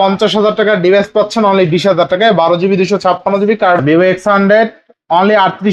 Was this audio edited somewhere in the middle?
yes; 1 cut; at 3.8 s

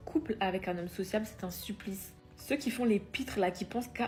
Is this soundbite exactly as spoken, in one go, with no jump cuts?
yes; 0 cuts

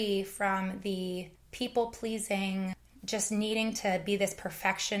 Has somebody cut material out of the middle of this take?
yes; 2 cuts; at 1.4 s, 2.9 s

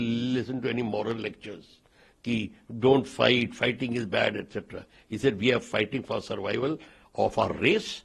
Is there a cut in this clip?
no; 0 cuts

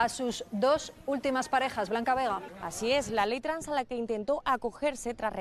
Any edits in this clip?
no; 0 cuts

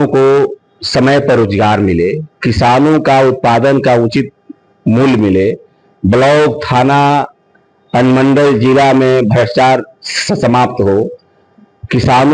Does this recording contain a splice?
no; 0 cuts

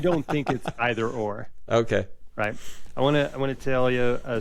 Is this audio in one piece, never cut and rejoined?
yes; 0 cuts

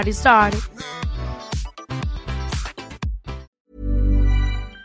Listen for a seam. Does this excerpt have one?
yes; 1 cut; at 3.5 s

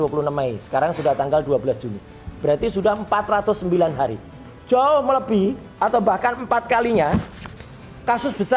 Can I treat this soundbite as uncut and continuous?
yes; 0 cuts

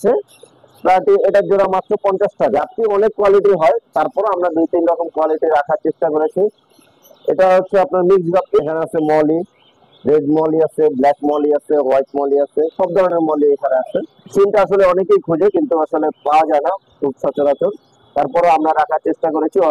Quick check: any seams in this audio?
yes; 3 cuts; at 2.5 s, 8.4 s, 14.2 s

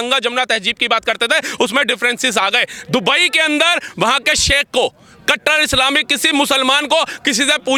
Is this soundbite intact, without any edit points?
yes; 0 cuts

